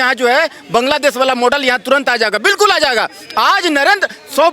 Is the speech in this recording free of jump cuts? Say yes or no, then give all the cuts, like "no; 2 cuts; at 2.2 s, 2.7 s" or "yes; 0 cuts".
yes; 0 cuts